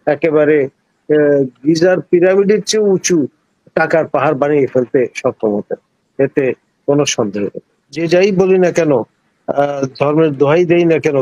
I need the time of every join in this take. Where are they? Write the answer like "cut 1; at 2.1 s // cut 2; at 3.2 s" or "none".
cut 1; at 8.0 s